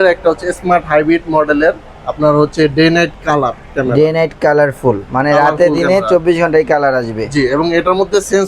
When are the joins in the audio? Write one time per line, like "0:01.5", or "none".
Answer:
none